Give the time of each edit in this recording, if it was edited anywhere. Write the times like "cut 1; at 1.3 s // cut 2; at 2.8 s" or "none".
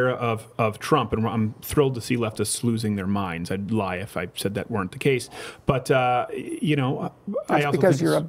none